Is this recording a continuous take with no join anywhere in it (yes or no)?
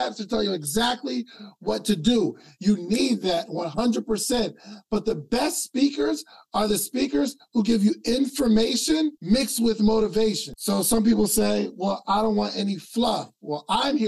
no